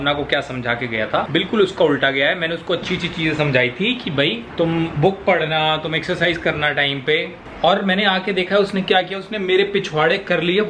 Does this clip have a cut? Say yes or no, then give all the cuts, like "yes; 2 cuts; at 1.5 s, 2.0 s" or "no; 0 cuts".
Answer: no; 0 cuts